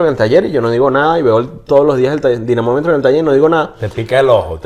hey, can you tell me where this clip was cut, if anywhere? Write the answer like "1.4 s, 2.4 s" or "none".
none